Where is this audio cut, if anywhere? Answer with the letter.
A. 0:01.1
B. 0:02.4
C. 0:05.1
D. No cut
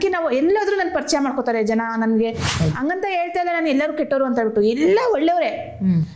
B